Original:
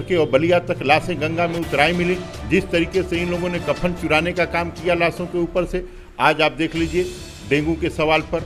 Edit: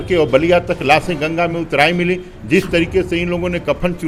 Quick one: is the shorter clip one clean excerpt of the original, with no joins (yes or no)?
yes